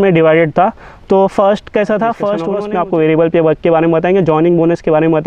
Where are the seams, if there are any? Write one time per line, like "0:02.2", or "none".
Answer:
0:02.5